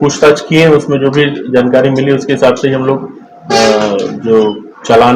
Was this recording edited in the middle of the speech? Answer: no; 0 cuts

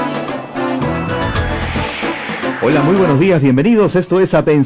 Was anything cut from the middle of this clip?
yes; 1 cut; at 1.5 s

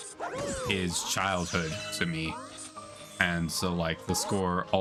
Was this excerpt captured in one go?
yes; 0 cuts

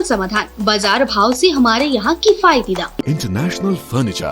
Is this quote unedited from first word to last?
no; 1 cut; at 3.0 s

